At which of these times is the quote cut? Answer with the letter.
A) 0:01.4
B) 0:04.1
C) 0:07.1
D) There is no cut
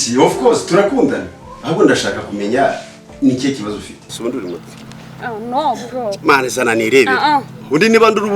B